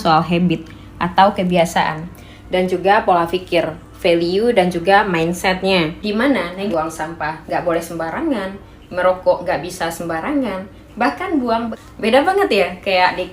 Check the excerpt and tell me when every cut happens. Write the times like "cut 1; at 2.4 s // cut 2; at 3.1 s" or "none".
cut 1; at 6.7 s // cut 2; at 11.8 s